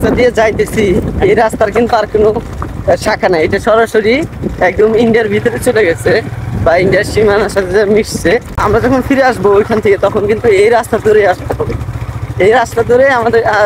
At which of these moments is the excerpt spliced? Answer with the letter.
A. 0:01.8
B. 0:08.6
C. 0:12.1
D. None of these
B